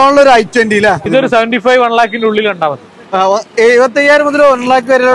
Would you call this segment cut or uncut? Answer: cut